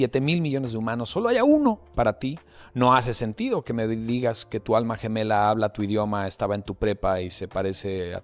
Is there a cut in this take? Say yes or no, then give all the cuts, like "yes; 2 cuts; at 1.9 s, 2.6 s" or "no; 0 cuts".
no; 0 cuts